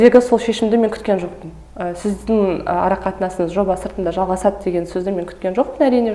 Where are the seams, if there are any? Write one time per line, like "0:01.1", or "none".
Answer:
none